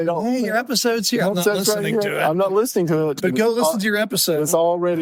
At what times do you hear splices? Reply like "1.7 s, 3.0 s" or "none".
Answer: none